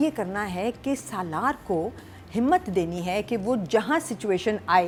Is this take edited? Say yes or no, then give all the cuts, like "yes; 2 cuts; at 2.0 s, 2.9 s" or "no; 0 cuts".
no; 0 cuts